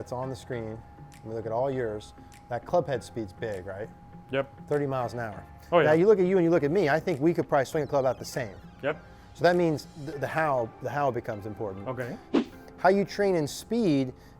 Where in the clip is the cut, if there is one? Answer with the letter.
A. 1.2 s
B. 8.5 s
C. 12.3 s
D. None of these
C